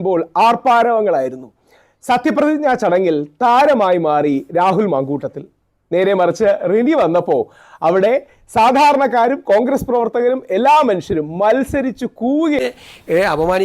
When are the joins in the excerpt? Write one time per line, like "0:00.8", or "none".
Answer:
0:12.6